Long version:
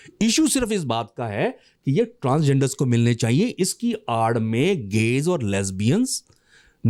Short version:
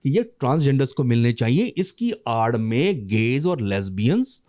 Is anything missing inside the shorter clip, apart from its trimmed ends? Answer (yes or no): no